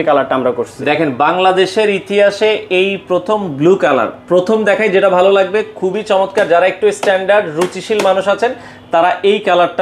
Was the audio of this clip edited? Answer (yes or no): no